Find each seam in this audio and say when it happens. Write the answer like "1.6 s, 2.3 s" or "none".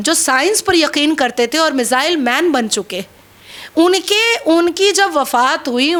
none